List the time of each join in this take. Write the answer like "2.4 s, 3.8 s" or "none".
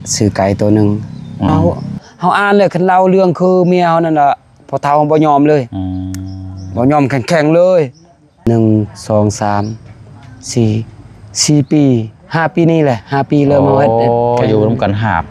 1.6 s, 8.5 s